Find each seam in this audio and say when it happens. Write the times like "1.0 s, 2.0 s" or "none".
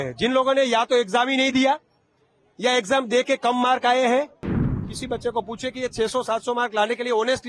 4.9 s